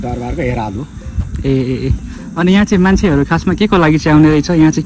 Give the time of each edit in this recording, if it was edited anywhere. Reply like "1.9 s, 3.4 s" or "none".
none